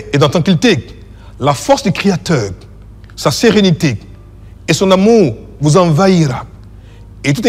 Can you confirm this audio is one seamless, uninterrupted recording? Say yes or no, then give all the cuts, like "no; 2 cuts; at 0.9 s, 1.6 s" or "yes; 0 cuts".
yes; 0 cuts